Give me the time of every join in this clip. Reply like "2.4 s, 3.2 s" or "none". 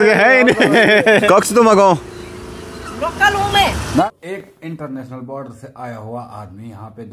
1.2 s, 4.0 s